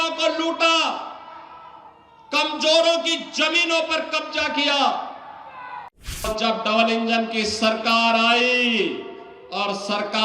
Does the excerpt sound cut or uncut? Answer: cut